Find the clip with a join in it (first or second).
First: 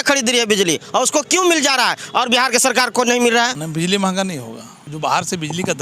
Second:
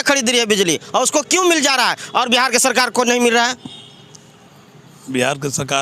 first